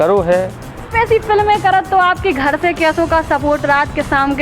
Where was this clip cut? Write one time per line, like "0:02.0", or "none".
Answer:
0:00.9